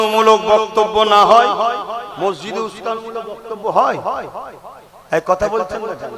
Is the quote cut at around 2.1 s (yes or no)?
yes